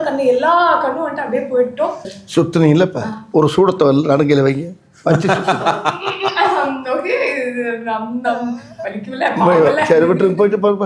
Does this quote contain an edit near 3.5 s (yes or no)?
no